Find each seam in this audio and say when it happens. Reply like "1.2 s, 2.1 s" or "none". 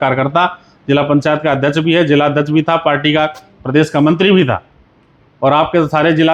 none